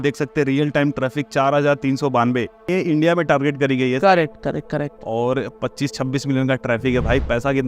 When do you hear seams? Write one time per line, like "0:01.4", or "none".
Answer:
0:02.7